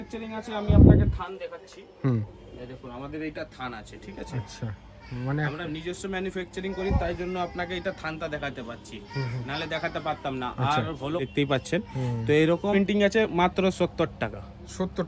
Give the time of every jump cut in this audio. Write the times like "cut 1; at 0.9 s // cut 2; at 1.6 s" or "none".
cut 1; at 11.3 s // cut 2; at 12.7 s

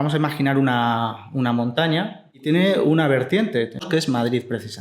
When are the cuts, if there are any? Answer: cut 1; at 2.4 s // cut 2; at 3.9 s

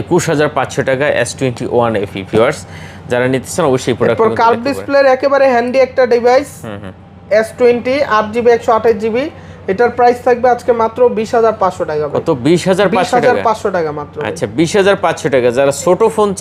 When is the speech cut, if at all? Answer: none

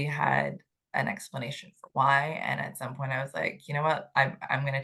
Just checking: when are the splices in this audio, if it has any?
none

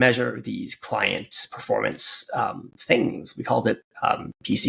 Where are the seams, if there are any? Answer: none

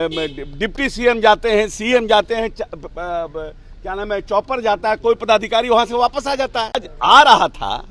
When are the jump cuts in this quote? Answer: cut 1; at 6.8 s

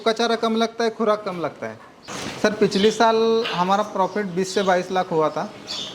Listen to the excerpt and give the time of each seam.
cut 1; at 2.1 s

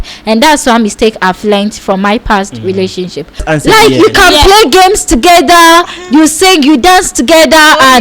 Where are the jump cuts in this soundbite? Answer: cut 1; at 3.4 s

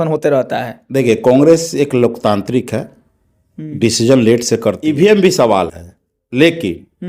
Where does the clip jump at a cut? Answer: cut 1; at 4.8 s

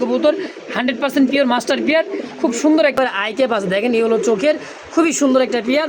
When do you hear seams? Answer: cut 1; at 2.9 s

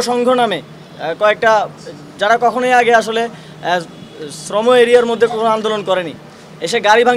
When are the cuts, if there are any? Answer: none

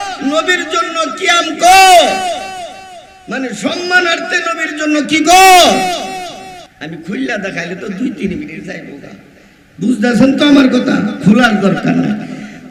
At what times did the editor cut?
none

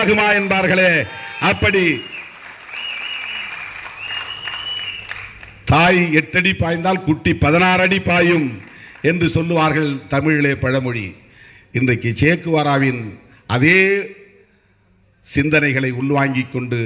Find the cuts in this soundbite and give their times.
none

